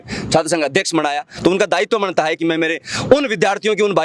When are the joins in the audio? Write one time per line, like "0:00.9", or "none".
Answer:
0:02.4